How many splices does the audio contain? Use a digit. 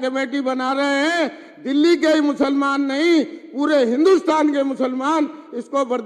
0